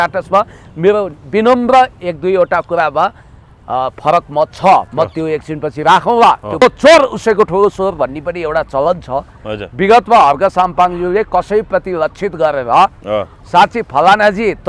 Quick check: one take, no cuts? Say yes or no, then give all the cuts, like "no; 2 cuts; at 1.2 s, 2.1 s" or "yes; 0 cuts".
no; 1 cut; at 6.6 s